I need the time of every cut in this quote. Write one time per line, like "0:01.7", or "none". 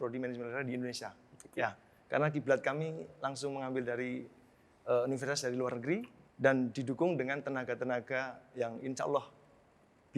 0:06.2

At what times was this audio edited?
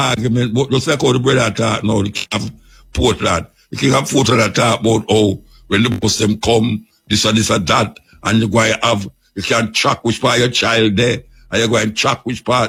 none

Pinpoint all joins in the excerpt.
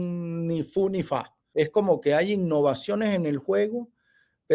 0:01.4

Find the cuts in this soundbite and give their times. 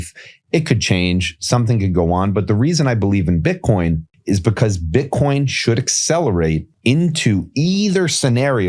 0:04.1
0:06.7

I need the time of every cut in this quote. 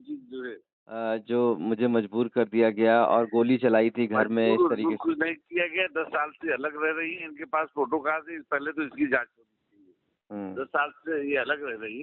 0:01.0

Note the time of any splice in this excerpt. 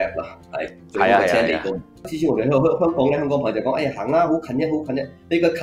0:02.1

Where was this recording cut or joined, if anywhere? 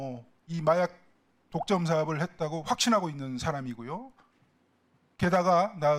none

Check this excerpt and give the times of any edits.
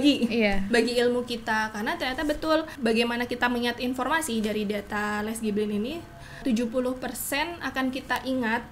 0:02.7
0:06.4

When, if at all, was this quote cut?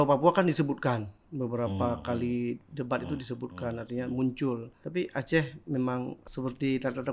0:04.7
0:06.2

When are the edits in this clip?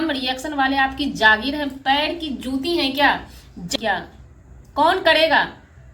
0:03.7

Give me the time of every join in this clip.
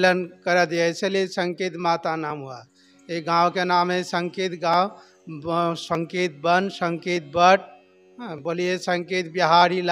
none

